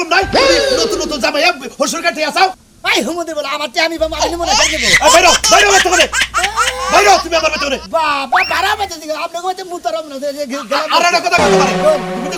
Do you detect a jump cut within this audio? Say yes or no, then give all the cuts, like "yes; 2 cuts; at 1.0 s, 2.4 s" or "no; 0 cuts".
no; 0 cuts